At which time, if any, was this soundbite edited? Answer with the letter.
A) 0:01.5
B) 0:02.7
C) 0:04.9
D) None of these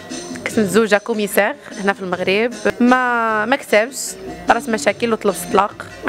B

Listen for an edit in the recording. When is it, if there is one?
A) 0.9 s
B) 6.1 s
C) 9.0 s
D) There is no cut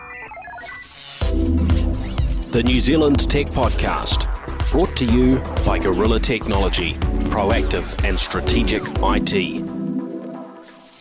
D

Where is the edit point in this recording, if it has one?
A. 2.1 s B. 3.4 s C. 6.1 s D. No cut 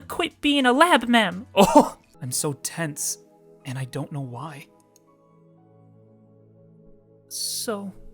A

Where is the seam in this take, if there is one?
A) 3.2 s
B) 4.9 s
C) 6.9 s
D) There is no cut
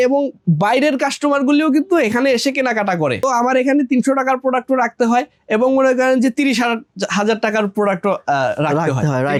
D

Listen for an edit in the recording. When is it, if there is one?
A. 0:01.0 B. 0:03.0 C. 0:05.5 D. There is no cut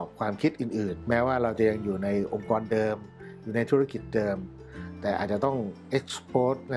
A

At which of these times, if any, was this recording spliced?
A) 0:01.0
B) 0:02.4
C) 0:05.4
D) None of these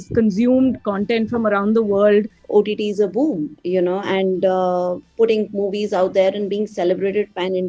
B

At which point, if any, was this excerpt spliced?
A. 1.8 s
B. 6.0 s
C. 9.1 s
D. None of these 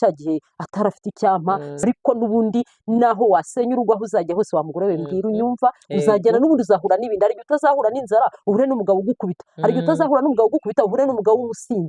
A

